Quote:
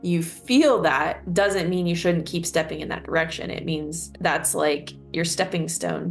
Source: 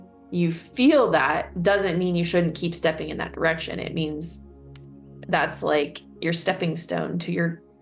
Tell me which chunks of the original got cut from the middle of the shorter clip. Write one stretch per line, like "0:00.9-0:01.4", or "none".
0:04.3-0:05.1